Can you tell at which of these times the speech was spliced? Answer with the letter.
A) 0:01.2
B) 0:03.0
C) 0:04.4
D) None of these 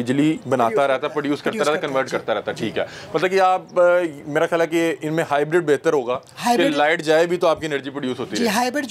D